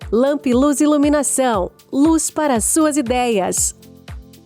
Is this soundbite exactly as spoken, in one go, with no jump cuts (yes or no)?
yes